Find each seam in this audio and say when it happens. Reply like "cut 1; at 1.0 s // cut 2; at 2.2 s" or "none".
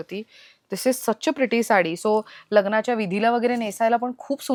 none